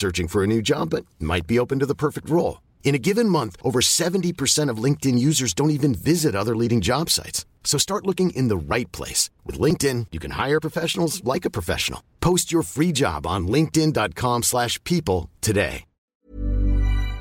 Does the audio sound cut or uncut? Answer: cut